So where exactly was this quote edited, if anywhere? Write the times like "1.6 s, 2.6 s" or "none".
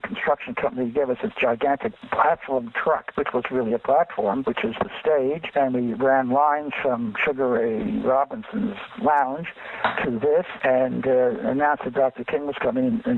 1.9 s

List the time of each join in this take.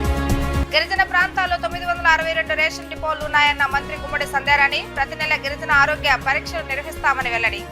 none

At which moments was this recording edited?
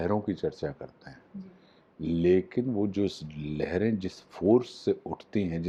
none

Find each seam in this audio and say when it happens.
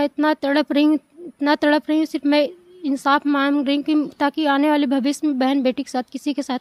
none

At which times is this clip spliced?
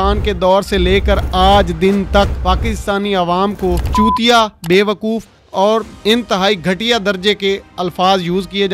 none

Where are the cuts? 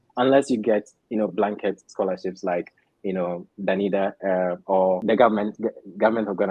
5.0 s

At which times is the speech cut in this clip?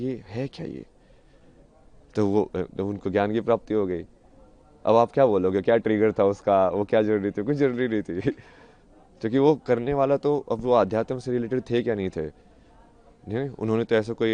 none

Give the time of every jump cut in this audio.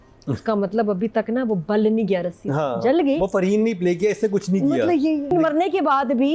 5.3 s

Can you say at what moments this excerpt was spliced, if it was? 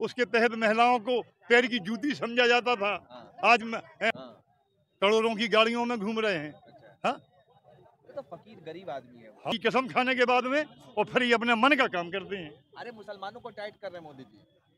4.1 s, 9.5 s

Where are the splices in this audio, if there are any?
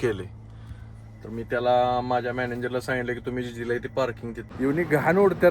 4.4 s

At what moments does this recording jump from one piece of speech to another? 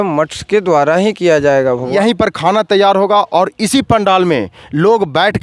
1.9 s

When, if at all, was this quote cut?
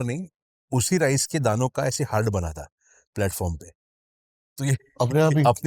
none

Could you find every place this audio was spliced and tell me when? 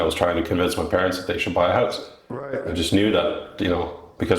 none

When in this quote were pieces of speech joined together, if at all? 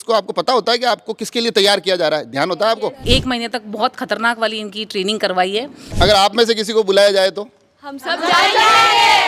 3.0 s, 5.8 s

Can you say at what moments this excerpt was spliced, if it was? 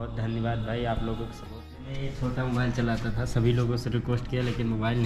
1.9 s

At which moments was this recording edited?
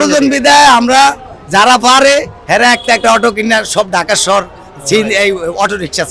none

